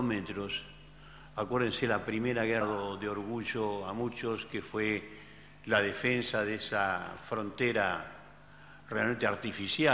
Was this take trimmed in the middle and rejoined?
no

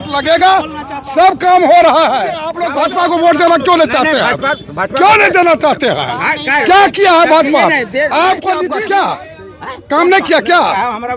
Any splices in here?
yes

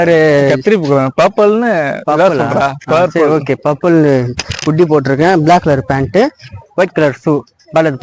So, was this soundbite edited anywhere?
no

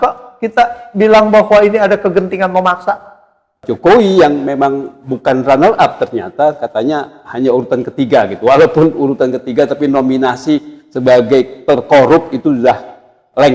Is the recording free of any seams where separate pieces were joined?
no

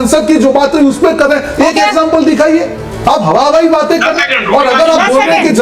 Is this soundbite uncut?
yes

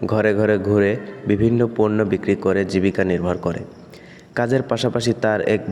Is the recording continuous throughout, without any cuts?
yes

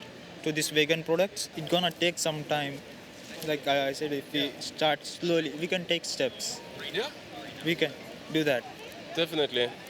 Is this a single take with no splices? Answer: no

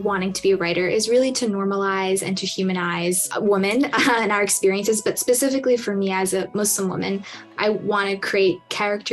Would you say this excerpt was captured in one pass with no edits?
no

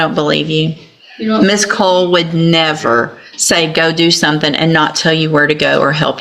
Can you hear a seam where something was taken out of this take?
no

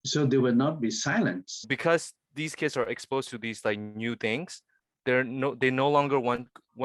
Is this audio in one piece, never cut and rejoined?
no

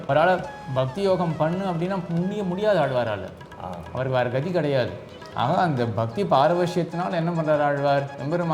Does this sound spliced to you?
no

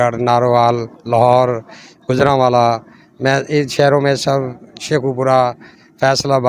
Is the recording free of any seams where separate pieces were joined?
yes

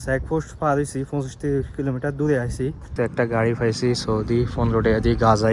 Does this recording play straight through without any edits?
no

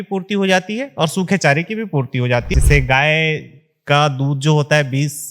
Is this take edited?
yes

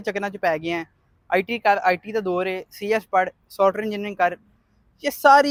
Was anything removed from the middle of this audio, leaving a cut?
no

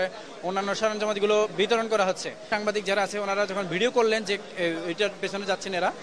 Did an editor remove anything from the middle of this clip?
yes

